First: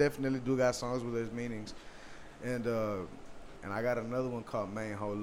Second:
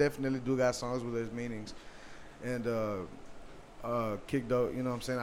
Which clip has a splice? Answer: first; 1 cut; at 3.6 s

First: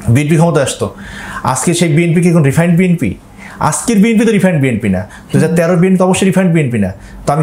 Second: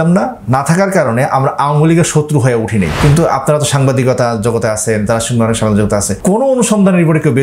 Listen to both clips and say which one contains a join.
second; 2 cuts; at 2.9 s, 6.1 s

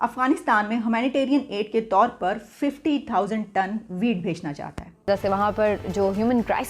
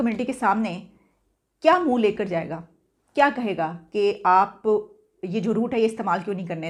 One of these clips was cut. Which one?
first; 1 cut; at 5.1 s

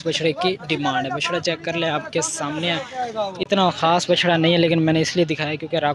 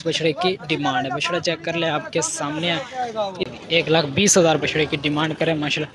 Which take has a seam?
second; 1 cut; at 3.5 s

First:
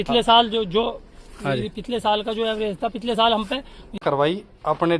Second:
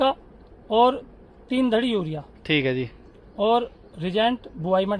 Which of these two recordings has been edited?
first; 1 cut; at 4.0 s

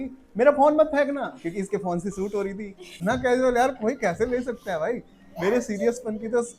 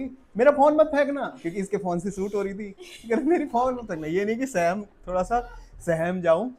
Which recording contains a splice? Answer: first; 1 cut; at 2.9 s

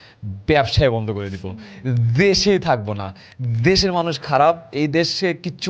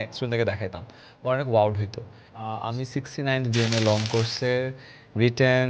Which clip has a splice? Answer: second; 1 cut; at 2.5 s

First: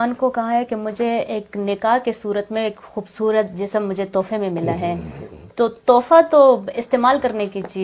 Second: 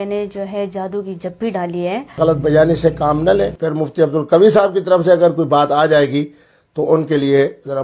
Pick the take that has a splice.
second; 2 cuts; at 2.1 s, 3.6 s

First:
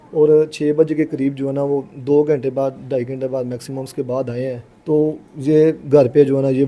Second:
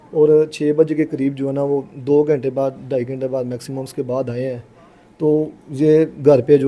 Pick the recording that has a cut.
first; 1 cut; at 4.7 s

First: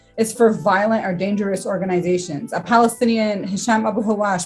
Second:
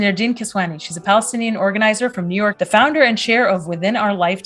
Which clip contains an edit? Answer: second; 1 cut; at 2.6 s

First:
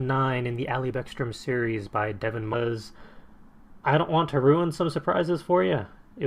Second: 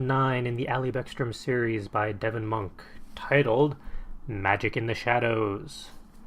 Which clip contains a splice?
second; 1 cut; at 2.5 s

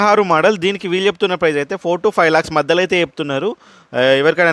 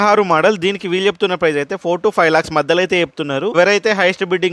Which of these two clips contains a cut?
second; 1 cut; at 3.5 s

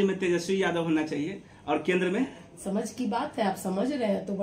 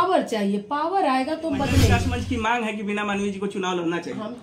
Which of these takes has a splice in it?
second; 1 cut; at 2.0 s

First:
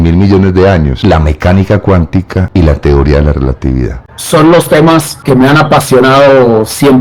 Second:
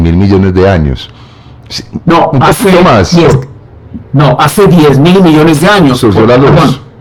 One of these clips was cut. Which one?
first; 4 cuts; at 0.9 s, 2.4 s, 4.1 s, 5.1 s

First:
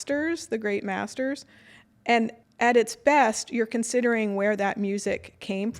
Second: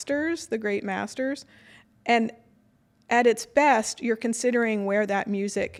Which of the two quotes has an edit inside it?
first; 1 cut; at 2.4 s

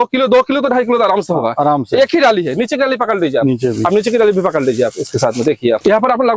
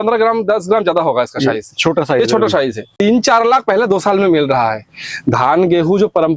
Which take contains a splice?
second; 1 cut; at 2.9 s

